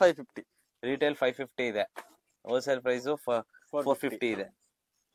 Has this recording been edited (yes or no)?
no